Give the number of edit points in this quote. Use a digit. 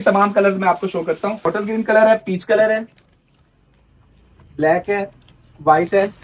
1